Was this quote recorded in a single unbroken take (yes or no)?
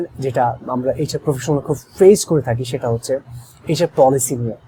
yes